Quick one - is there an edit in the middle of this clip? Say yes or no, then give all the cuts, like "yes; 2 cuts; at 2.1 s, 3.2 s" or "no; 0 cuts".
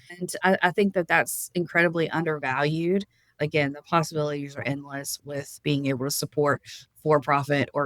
yes; 2 cuts; at 3.4 s, 5.1 s